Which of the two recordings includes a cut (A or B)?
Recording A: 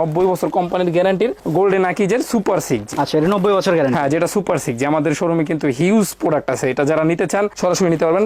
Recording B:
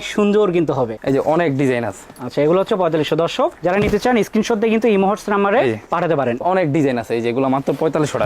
B